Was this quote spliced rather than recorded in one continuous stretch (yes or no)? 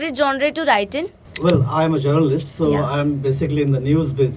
yes